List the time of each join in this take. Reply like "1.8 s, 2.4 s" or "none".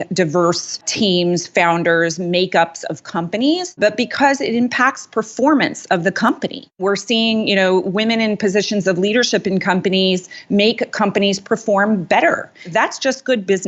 0.9 s, 3.8 s, 6.8 s